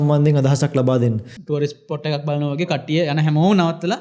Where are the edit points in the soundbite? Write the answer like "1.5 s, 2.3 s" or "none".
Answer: 1.3 s